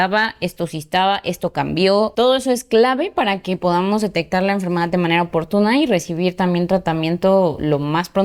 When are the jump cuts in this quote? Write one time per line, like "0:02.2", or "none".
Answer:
none